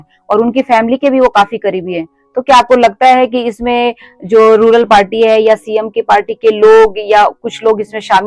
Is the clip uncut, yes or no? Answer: yes